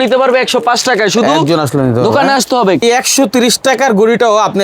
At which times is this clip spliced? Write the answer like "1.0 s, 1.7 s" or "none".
2.8 s